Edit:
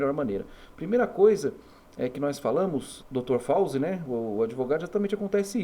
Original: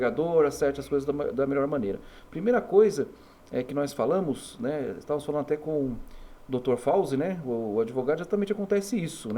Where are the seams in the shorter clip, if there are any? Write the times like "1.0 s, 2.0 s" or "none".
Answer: 2.9 s